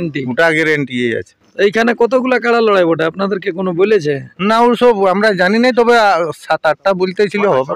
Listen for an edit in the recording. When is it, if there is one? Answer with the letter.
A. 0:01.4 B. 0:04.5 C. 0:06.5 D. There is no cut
D